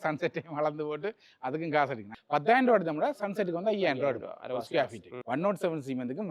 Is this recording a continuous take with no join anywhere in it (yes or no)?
no